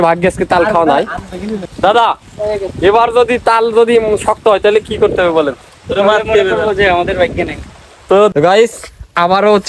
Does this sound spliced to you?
yes; 2 cuts; at 1.2 s, 8.3 s

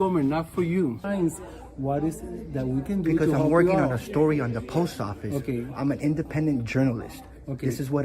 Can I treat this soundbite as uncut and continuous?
no; 1 cut; at 0.9 s

